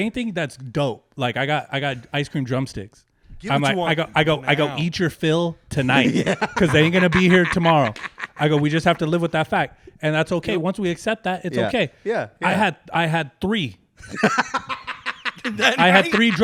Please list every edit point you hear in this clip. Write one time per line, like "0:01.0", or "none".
none